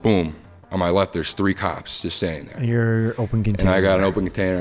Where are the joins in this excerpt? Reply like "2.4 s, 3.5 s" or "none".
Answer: none

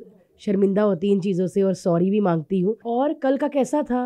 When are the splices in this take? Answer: 2.8 s

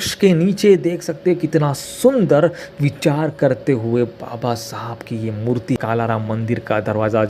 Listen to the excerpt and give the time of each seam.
5.8 s

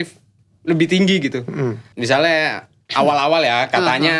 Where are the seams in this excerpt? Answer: 1.9 s

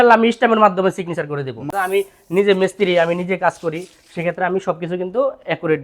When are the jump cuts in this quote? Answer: 1.6 s

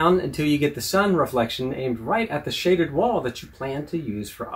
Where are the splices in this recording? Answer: none

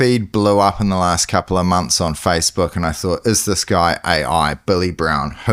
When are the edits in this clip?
none

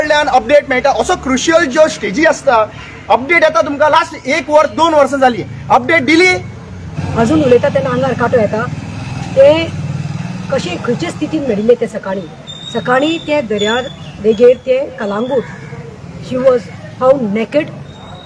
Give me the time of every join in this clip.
6.8 s

